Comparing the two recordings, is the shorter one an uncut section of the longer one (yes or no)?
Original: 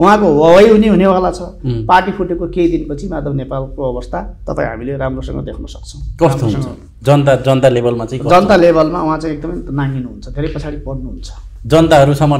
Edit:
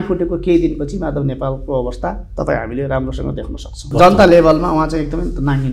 no